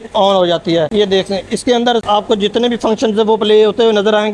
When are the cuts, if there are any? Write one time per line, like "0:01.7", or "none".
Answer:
none